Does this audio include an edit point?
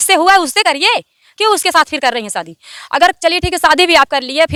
no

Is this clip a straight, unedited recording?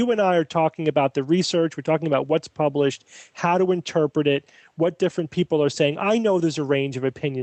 yes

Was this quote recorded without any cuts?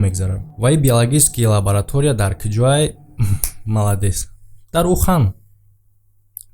yes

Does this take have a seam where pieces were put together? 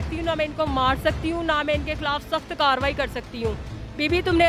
no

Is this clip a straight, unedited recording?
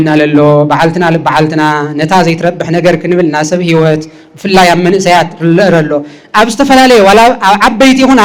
yes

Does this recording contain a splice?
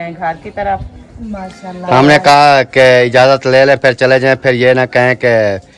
no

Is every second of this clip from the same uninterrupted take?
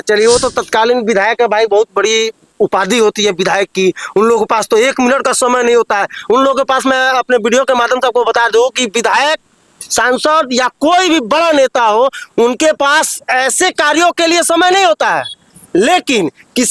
yes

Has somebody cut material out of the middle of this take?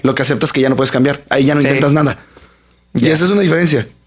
no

